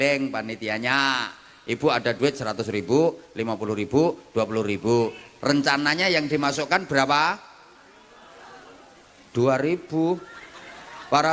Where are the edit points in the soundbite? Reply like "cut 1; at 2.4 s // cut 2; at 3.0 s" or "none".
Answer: none